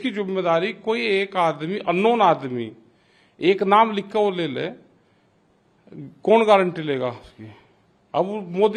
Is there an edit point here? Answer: no; 0 cuts

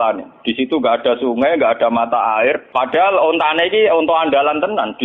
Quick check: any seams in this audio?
yes; 1 cut; at 2.7 s

